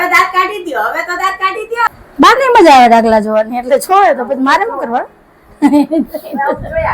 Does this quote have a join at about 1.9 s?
yes; 1 cut; at 1.9 s

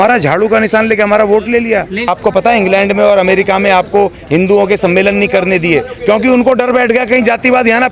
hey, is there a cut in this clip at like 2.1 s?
yes; 1 cut; at 2.1 s

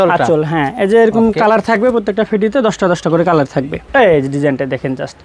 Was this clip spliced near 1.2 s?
no; 1 cut; at 3.8 s

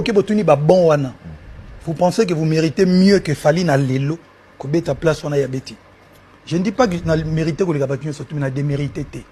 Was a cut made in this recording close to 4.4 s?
no; 0 cuts

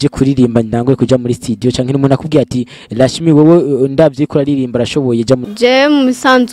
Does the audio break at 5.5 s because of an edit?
yes; 1 cut; at 5.5 s

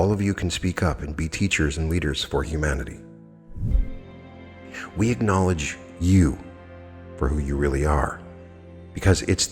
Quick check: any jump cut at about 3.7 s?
yes; 1 cut; at 3.7 s

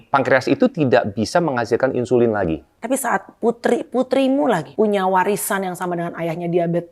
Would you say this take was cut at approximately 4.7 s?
yes; 2 cuts; at 2.7 s, 4.7 s

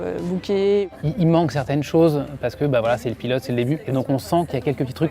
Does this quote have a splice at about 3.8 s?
yes; 2 cuts; at 0.9 s, 3.8 s

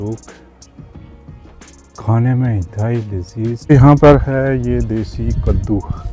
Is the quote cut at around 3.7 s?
yes; 1 cut; at 3.7 s

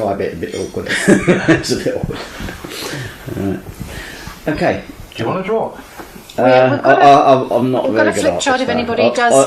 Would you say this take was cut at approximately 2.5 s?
no; 1 cut; at 4.9 s

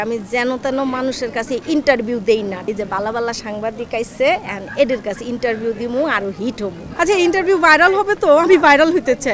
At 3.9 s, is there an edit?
no; 2 cuts; at 2.6 s, 6.8 s

